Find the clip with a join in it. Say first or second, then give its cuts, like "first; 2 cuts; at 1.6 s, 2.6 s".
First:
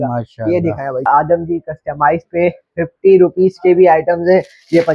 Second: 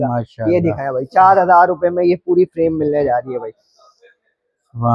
first; 1 cut; at 1.1 s